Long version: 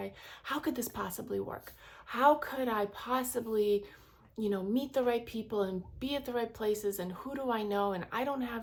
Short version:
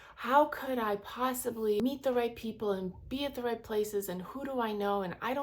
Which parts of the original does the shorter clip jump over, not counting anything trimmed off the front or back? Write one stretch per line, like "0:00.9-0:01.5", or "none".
0:03.7-0:04.7